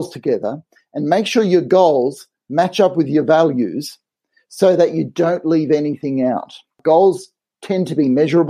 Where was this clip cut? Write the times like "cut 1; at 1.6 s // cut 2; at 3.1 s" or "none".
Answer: cut 1; at 6.8 s